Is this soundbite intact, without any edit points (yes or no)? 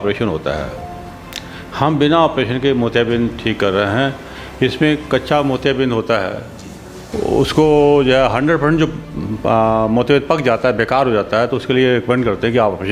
yes